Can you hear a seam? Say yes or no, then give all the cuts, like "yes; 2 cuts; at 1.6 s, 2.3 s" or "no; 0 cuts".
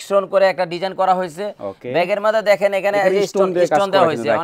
no; 0 cuts